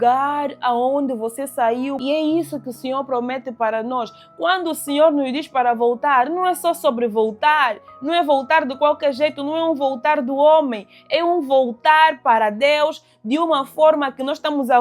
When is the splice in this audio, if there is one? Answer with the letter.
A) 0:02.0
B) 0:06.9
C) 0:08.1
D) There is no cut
A